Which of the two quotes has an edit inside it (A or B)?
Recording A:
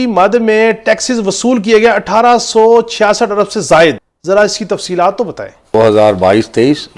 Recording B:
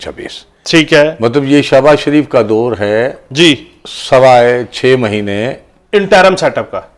A